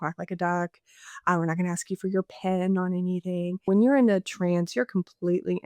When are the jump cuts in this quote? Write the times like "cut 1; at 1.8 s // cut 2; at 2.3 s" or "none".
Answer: cut 1; at 3.7 s